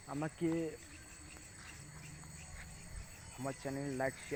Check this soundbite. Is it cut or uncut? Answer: uncut